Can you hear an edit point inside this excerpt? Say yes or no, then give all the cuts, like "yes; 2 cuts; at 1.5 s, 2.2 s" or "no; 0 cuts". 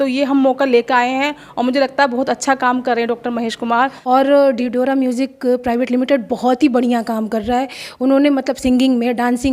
yes; 1 cut; at 4.0 s